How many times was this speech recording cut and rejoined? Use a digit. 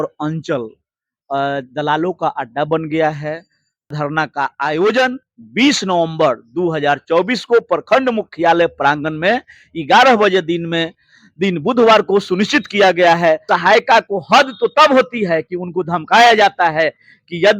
2